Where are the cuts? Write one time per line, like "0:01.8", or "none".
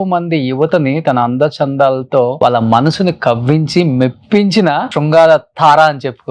0:02.3
0:04.9